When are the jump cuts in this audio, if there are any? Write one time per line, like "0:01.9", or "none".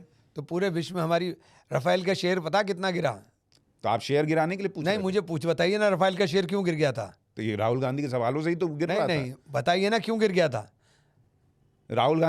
none